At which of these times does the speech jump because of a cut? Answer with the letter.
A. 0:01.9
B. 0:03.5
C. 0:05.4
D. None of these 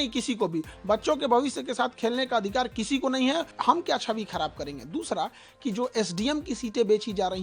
B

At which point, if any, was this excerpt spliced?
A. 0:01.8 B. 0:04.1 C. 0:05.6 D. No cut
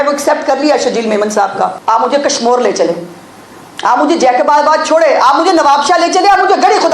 A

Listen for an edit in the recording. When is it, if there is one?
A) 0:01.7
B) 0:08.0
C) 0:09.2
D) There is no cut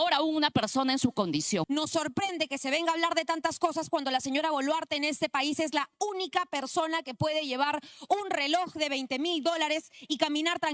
A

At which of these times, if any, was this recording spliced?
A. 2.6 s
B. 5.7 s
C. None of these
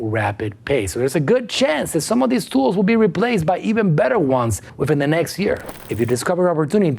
B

